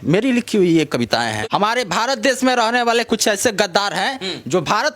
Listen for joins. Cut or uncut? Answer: cut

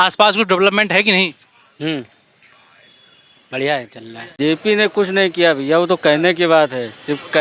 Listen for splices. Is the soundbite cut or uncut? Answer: cut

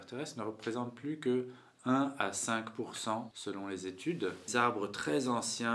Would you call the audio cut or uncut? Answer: cut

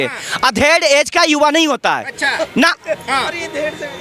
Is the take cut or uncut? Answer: uncut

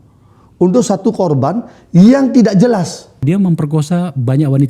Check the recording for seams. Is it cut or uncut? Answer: cut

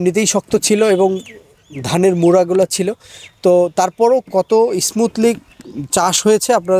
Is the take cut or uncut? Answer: uncut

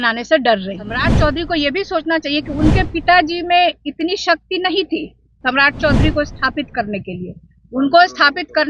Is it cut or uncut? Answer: cut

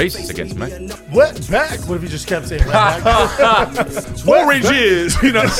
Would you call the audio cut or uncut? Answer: cut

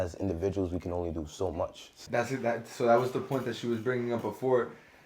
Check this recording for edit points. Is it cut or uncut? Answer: cut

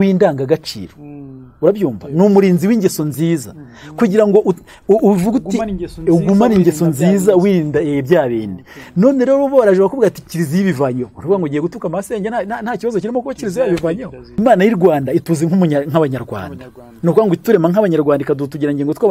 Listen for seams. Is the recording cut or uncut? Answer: cut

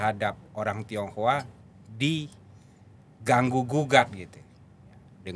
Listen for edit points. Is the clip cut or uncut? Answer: uncut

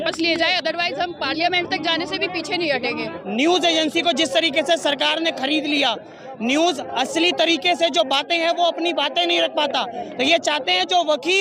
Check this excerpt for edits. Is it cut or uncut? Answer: cut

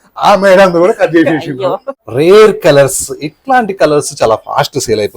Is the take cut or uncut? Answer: cut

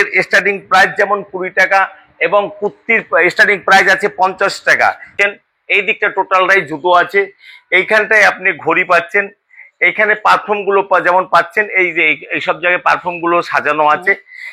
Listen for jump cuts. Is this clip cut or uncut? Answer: cut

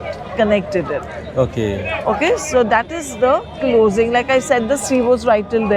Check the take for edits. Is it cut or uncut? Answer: uncut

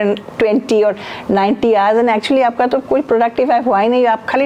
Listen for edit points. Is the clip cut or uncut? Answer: uncut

